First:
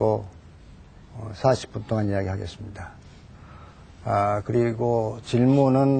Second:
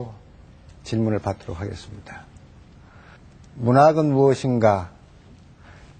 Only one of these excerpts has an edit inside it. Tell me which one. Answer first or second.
first